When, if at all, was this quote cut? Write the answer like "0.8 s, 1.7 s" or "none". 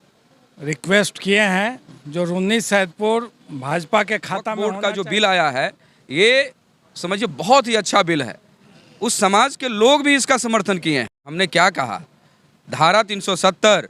4.5 s, 11.3 s